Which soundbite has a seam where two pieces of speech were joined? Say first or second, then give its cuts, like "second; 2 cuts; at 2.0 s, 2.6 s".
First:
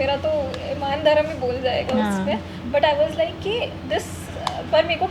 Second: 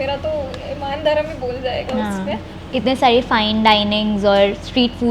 second; 1 cut; at 2.5 s